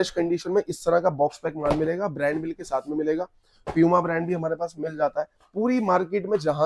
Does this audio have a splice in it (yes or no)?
no